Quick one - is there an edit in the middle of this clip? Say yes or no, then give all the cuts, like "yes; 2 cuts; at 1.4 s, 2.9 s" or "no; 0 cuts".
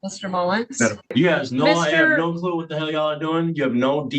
yes; 1 cut; at 1.1 s